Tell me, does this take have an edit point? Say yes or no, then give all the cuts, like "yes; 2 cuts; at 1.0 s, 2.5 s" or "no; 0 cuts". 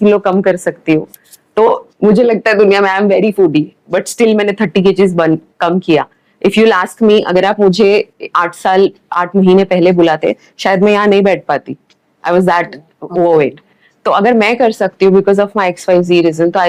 no; 0 cuts